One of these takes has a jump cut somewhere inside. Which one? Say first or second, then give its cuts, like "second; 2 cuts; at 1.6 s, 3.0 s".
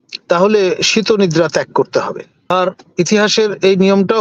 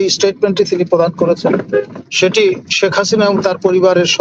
first; 1 cut; at 2.3 s